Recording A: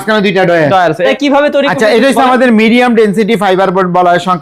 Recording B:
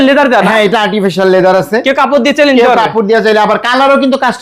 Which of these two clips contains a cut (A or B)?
A